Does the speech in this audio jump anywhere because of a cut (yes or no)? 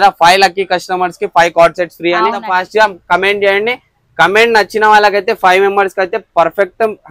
yes